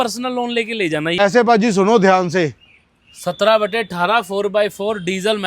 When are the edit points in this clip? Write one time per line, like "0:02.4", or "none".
0:01.1